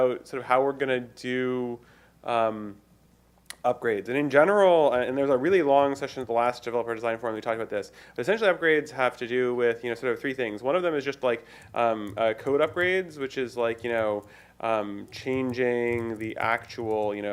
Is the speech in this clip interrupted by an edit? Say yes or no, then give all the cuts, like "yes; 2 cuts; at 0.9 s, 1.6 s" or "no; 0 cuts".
no; 0 cuts